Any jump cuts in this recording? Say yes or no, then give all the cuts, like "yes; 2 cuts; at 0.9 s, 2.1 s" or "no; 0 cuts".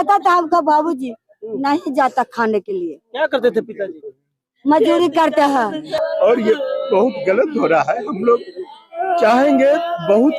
yes; 1 cut; at 6.0 s